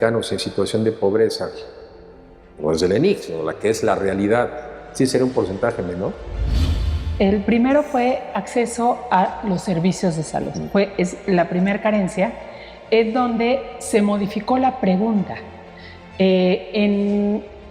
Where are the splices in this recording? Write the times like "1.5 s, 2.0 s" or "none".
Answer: 6.7 s